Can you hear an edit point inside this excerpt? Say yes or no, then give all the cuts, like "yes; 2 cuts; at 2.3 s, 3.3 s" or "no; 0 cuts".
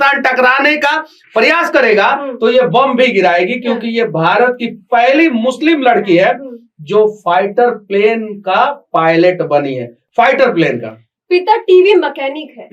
no; 0 cuts